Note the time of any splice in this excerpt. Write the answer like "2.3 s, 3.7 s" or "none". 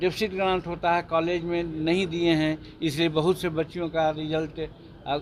none